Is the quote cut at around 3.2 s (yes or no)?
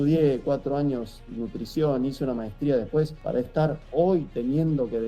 yes